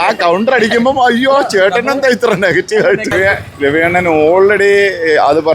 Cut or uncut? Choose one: cut